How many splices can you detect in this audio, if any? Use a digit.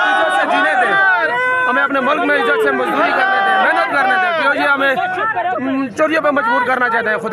0